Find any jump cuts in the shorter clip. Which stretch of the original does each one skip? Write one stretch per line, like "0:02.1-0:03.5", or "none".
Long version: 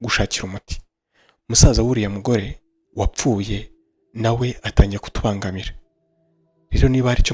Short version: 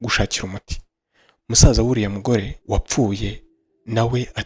0:02.6-0:02.8